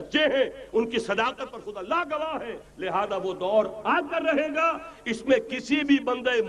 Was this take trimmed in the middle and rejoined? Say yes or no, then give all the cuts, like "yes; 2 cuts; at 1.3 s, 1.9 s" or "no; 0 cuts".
yes; 1 cut; at 2.6 s